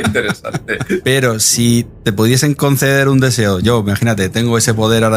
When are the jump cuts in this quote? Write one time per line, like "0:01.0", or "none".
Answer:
0:01.0
0:01.9